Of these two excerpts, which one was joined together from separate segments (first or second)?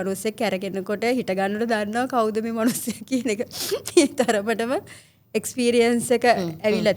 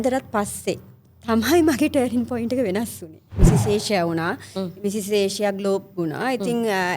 second